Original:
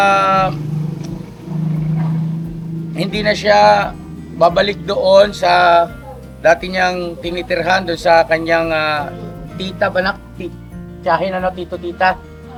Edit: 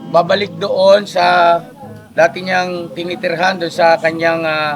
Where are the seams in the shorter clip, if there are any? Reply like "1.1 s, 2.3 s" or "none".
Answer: none